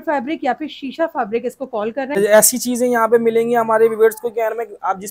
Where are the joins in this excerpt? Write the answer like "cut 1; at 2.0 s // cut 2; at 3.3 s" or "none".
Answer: cut 1; at 2.1 s